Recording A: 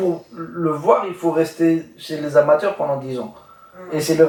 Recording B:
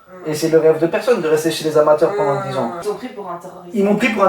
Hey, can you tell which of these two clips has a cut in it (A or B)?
B